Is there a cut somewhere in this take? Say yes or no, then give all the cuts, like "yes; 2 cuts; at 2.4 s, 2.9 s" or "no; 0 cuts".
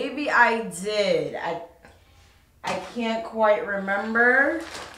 no; 0 cuts